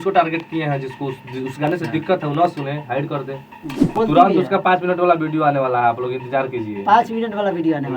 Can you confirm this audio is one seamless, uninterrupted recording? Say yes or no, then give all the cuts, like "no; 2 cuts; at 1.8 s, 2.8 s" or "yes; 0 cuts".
no; 1 cut; at 3.9 s